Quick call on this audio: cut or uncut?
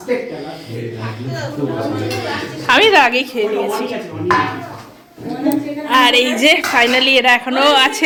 uncut